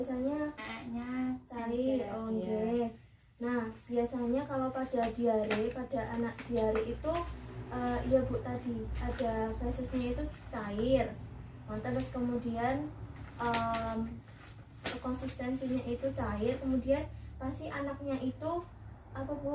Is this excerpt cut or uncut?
uncut